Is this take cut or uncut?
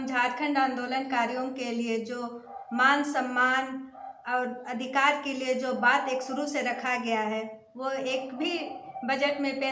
uncut